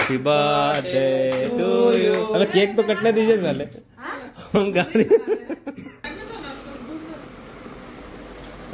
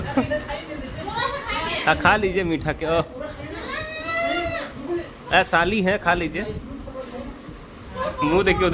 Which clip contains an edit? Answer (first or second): first